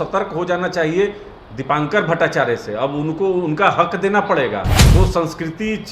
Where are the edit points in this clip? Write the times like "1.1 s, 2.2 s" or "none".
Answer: 4.8 s